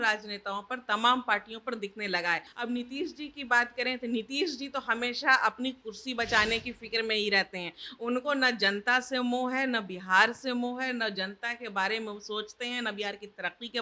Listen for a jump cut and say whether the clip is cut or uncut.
cut